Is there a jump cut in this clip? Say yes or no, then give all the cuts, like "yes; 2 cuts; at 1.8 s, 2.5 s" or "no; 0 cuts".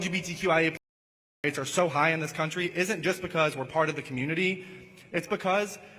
no; 0 cuts